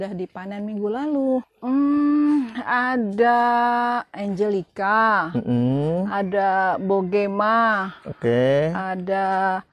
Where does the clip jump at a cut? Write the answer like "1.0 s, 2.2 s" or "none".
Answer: 1.5 s

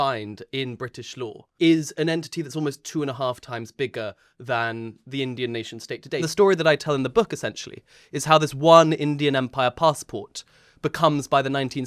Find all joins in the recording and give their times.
1.4 s, 6.2 s

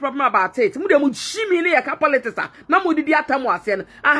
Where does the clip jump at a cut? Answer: none

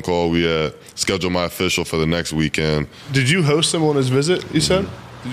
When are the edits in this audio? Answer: 3.0 s

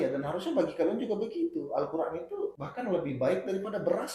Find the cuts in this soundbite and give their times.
2.6 s

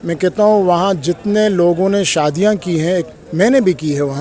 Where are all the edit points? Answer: none

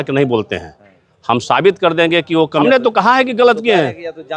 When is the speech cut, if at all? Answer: 2.6 s

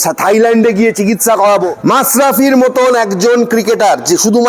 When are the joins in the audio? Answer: 1.7 s

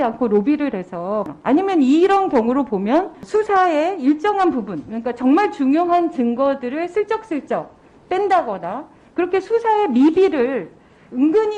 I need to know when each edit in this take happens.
1.3 s, 3.2 s

